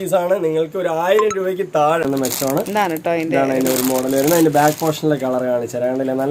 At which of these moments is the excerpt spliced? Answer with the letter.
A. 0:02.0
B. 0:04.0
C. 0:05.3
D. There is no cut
A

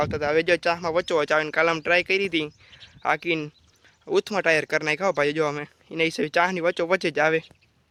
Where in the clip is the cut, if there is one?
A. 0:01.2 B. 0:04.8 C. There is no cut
C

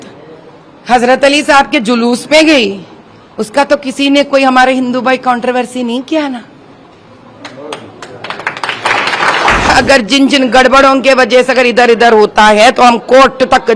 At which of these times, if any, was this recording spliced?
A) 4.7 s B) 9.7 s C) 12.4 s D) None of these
B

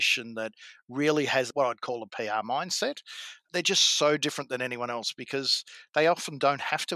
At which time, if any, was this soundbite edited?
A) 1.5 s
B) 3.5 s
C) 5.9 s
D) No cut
A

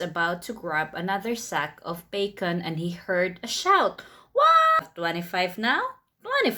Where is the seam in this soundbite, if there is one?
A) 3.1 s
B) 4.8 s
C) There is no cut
B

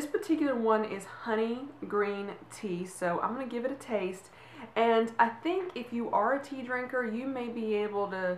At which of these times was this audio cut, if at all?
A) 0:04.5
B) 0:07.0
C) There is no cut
B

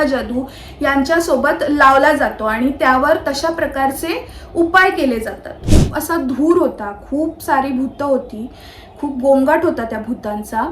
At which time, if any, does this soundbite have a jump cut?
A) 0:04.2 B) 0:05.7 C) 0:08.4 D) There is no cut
B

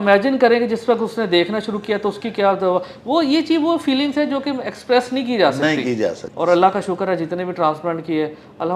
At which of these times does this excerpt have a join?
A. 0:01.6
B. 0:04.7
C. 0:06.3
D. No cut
C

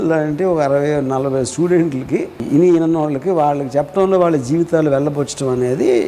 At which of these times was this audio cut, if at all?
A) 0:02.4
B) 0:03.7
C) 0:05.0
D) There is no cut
A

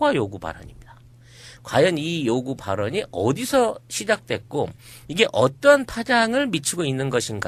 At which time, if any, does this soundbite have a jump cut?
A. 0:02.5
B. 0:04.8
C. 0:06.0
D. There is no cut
D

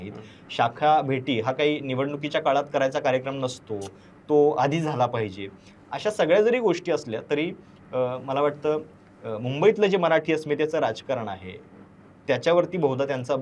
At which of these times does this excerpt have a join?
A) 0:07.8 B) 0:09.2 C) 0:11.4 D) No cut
D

